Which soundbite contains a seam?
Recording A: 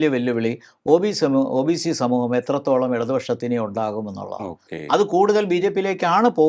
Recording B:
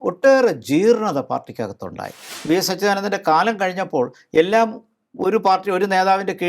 B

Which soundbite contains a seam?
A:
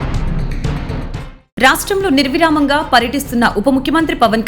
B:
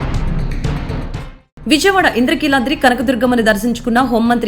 A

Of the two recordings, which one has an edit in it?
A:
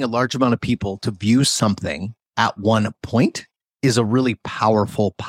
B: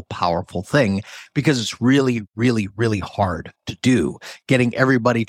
B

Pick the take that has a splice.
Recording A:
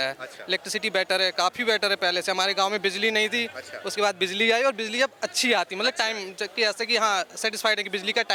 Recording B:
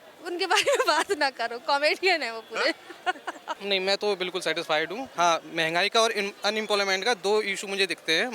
B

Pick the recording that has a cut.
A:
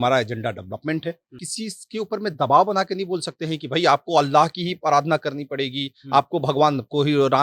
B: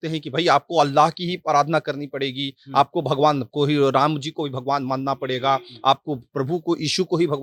A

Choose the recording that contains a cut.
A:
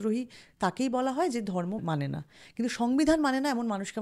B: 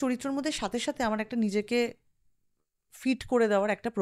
A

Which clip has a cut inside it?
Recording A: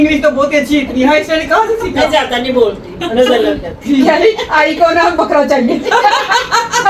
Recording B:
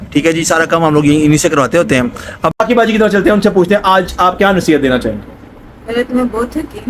B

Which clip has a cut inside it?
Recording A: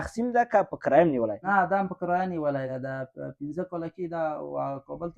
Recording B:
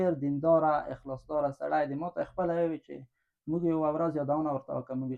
A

